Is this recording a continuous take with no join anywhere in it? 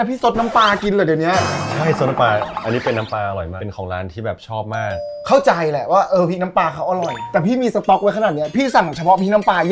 yes; 0 cuts

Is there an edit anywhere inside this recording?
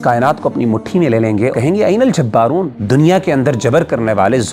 yes; 2 cuts; at 1.5 s, 2.8 s

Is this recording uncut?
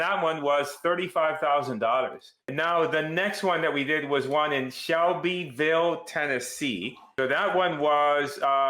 no; 2 cuts; at 2.4 s, 7.0 s

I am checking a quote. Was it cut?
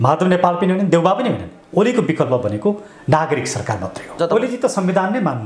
yes; 1 cut; at 4.2 s

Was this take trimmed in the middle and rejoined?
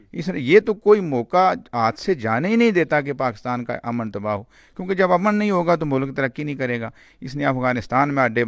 no; 0 cuts

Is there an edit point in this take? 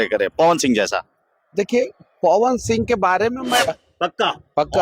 yes; 1 cut; at 3.9 s

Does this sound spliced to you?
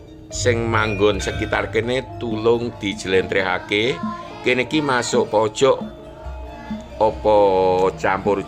no; 0 cuts

